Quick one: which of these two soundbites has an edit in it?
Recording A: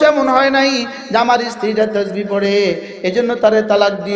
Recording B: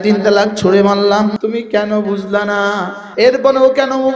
B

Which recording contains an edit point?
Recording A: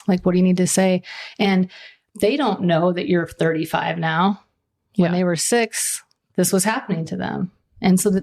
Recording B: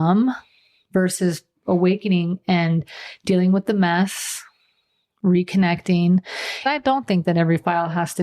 B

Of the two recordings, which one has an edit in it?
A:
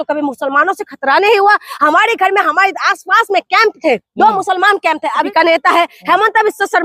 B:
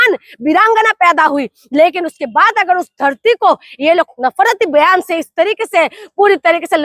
A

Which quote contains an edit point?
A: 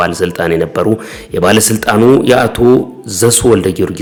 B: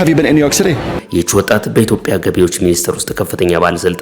B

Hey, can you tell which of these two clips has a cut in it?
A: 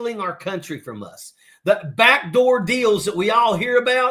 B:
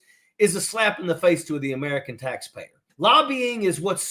B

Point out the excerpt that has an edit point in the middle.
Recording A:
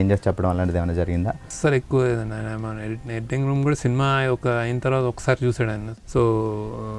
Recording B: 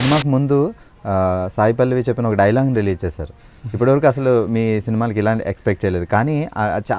A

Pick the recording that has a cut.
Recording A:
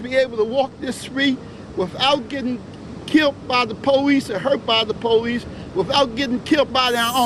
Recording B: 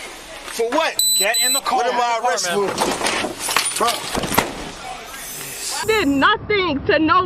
B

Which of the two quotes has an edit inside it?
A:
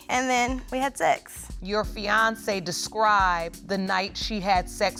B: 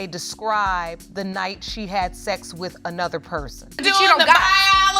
B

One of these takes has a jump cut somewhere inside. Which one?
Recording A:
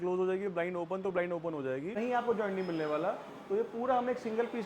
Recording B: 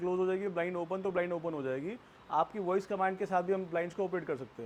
A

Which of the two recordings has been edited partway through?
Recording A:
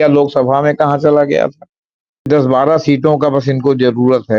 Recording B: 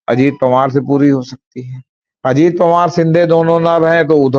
A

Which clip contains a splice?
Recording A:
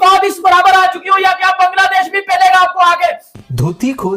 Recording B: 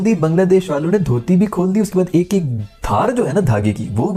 A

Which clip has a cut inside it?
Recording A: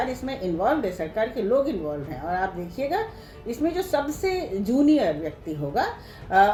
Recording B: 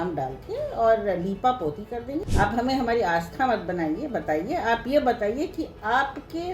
B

